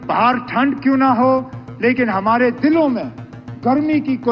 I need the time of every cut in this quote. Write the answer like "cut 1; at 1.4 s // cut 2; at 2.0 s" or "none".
none